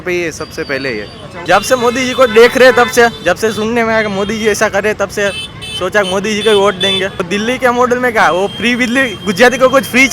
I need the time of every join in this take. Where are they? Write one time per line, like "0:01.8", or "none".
0:01.3
0:07.2